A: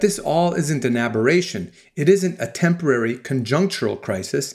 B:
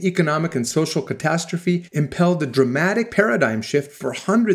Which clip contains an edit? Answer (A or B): B